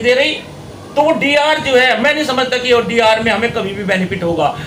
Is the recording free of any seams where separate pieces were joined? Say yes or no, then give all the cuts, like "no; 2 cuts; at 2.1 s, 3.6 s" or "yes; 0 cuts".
yes; 0 cuts